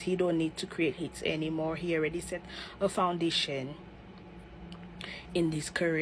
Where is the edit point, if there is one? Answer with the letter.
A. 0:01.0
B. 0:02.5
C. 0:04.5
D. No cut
D